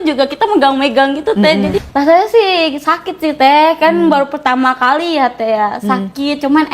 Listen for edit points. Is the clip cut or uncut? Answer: cut